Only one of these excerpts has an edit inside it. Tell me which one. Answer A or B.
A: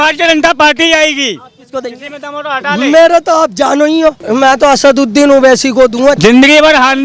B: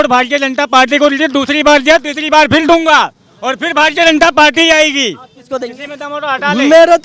A